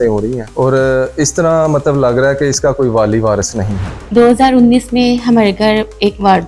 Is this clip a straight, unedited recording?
no; 1 cut; at 3.9 s

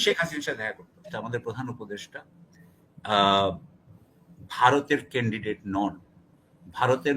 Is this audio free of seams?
no; 1 cut; at 1.2 s

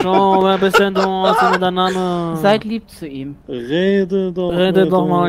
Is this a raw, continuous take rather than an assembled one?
no; 1 cut; at 3.4 s

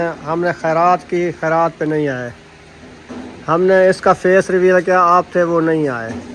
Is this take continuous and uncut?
yes; 0 cuts

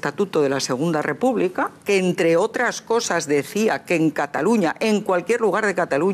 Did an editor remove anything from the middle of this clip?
no; 0 cuts

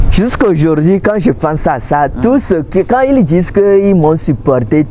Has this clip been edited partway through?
no; 0 cuts

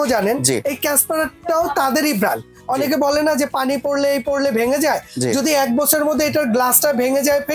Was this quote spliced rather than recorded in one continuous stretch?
yes; 1 cut; at 2.6 s

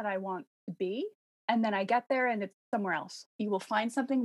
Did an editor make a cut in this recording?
yes; 2 cuts; at 1.4 s, 3.3 s

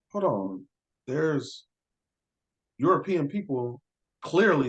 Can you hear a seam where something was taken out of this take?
no; 0 cuts

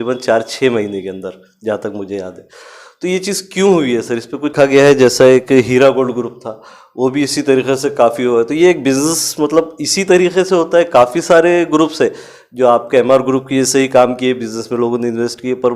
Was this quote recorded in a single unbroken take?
no; 1 cut; at 4.5 s

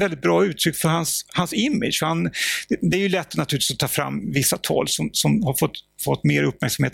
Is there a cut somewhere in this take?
no; 0 cuts

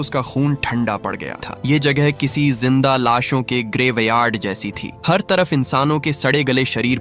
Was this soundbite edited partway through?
yes; 1 cut; at 1.4 s

